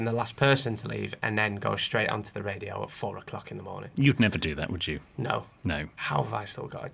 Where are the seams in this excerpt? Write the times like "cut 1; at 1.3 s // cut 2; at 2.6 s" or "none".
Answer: cut 1; at 6.0 s